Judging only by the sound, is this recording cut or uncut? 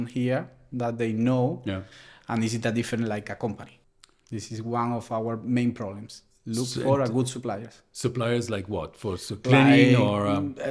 cut